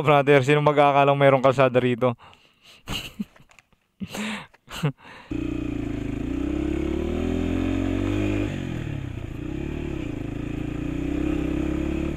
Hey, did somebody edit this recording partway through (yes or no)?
no